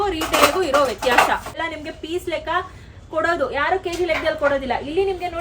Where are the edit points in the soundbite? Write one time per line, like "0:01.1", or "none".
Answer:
0:01.6